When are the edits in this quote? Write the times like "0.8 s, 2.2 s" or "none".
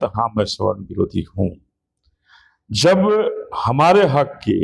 none